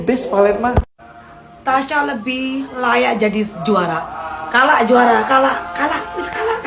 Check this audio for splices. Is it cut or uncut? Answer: uncut